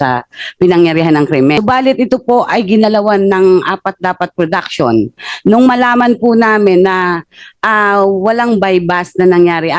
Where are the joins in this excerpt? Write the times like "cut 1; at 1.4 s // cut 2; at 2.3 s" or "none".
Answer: cut 1; at 1.5 s